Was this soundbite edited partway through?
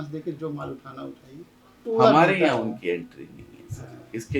yes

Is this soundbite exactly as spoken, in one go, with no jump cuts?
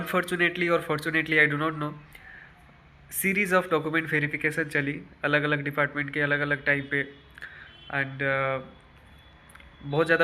yes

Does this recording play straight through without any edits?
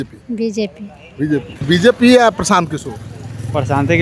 no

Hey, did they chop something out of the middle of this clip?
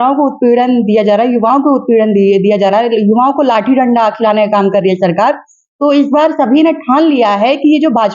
no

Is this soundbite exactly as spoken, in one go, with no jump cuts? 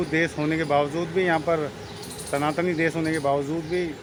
yes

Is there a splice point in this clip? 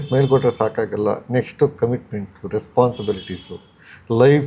no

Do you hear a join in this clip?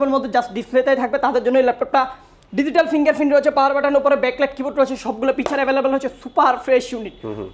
no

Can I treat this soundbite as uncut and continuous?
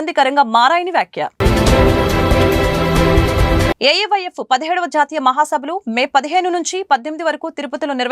yes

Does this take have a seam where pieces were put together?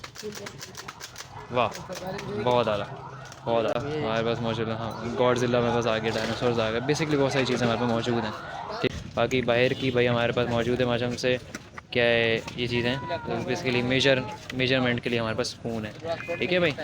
yes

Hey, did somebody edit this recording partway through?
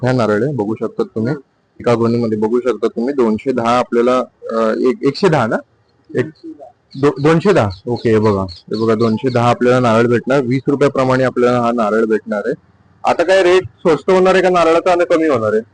yes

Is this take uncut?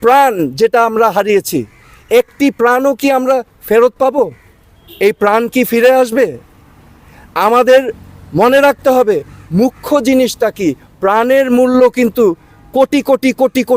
yes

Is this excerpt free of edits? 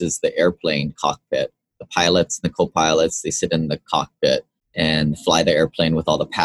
no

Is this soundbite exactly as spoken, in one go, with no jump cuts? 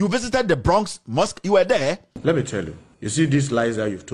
no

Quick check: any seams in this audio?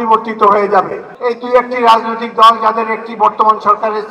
yes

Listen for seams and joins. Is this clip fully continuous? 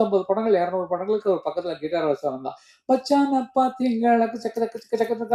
yes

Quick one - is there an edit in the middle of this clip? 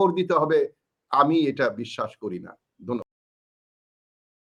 no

